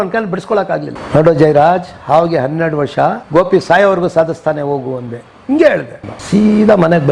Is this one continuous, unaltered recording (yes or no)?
no